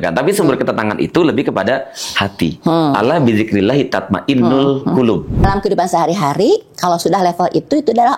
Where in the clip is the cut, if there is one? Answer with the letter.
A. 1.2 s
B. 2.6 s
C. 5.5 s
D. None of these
C